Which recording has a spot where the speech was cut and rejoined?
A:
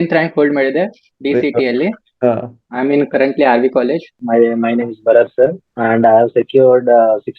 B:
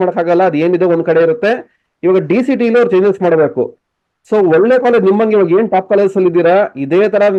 A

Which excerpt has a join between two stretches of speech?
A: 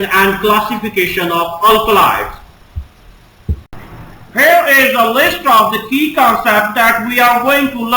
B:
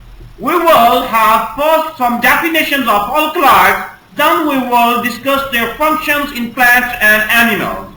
A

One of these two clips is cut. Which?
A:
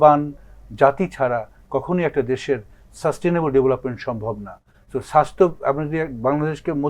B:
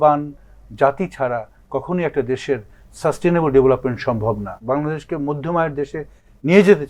B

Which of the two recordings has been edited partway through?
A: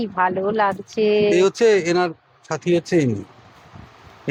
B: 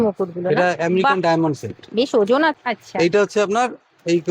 B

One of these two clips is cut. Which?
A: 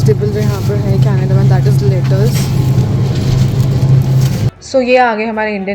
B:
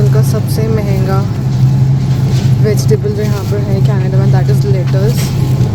A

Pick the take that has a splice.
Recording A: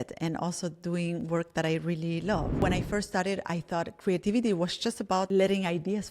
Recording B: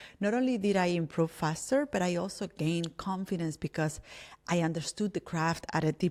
A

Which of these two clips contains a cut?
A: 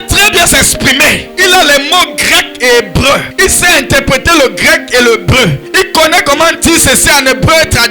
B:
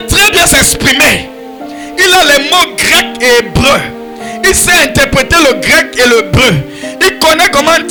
A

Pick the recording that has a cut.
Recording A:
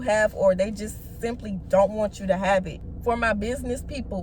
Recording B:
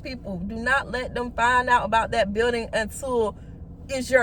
A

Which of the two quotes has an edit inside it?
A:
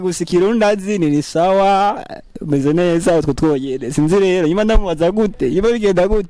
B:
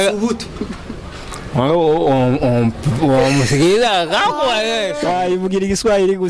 B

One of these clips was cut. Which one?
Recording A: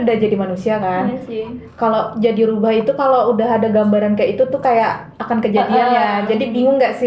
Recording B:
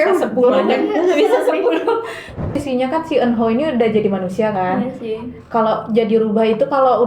B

